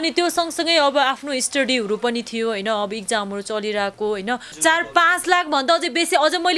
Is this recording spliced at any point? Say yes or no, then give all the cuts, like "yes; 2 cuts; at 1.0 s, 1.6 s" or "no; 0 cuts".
yes; 1 cut; at 4.5 s